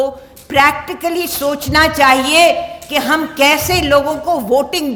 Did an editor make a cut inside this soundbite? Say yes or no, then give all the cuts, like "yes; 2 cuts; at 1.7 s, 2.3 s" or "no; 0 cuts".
no; 0 cuts